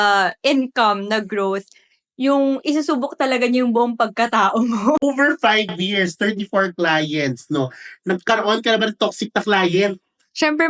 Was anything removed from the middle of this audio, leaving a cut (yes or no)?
yes